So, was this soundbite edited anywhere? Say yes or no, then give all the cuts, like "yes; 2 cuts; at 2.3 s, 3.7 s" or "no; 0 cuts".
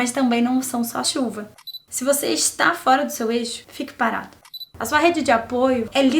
yes; 2 cuts; at 1.5 s, 4.3 s